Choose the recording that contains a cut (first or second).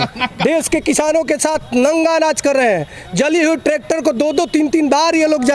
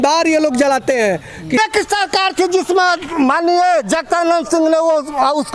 second